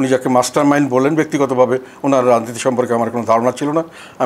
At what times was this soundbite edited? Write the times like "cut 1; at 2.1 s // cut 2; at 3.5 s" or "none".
none